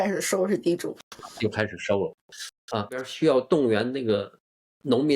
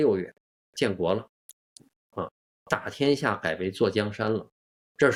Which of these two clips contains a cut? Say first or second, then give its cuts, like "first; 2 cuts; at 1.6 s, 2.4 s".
first; 1 cut; at 3.1 s